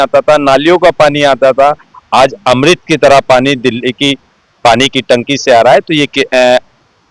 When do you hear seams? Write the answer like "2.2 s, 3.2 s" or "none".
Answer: none